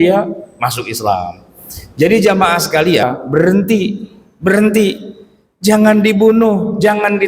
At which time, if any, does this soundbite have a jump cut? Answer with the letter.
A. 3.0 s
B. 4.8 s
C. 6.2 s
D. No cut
A